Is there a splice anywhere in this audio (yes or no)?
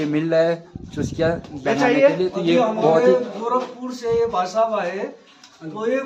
no